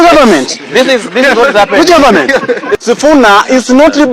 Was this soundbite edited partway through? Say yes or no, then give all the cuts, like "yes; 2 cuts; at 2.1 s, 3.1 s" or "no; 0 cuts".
yes; 1 cut; at 2.7 s